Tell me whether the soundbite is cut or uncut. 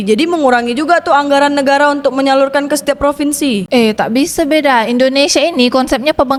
uncut